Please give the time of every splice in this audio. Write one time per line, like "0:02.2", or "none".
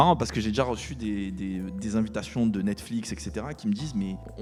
none